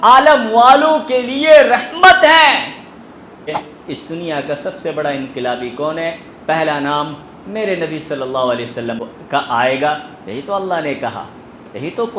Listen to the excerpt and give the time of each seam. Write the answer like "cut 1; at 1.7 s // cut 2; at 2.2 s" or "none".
cut 1; at 3.5 s // cut 2; at 9.0 s